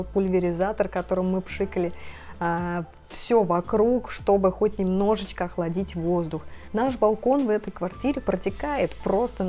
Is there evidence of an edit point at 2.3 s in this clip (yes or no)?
no